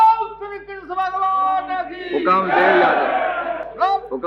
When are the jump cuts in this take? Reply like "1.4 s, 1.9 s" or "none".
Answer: none